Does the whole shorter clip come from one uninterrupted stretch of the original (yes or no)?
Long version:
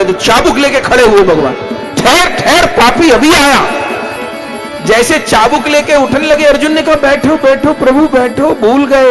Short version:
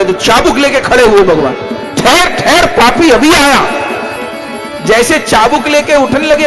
yes